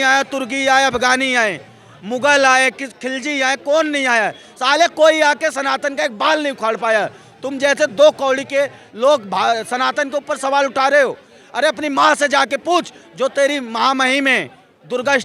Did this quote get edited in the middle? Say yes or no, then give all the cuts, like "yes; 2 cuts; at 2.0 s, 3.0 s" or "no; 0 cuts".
no; 0 cuts